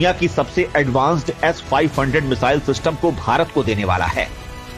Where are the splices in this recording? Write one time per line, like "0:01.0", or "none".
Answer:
none

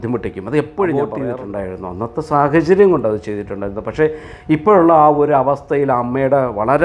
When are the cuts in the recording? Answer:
0:01.2

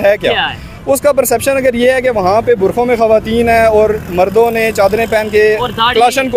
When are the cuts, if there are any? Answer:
none

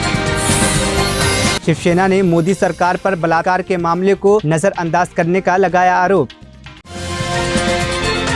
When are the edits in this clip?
none

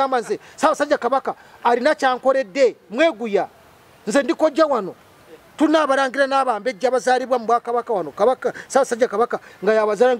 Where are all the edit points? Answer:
none

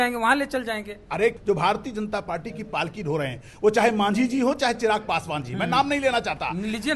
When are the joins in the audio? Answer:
0:01.4

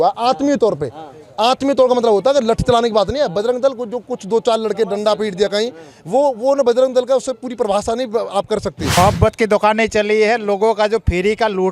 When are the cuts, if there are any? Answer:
0:08.8

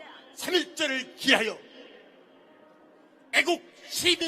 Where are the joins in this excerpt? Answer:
0:02.8

